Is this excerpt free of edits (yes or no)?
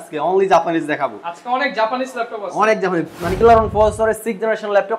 no